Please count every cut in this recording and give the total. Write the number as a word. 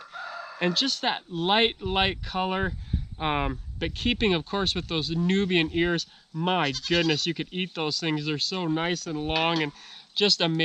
zero